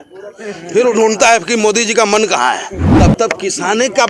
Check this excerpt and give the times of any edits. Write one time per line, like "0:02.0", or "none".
0:02.8